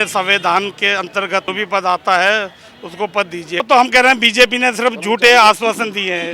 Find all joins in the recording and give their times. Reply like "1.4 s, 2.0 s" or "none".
1.5 s, 3.6 s